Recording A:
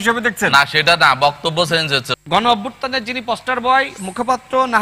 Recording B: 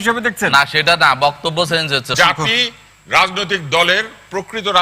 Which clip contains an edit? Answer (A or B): B